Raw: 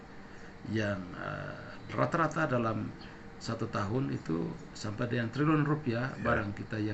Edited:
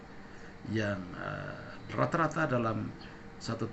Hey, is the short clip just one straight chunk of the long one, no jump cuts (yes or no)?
yes